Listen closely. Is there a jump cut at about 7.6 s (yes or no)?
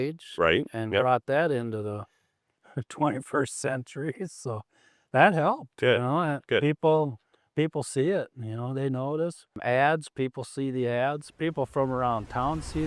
no